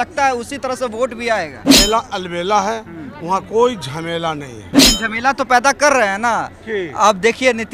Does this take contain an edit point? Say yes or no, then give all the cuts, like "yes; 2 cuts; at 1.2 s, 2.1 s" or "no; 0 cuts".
yes; 2 cuts; at 1.6 s, 4.7 s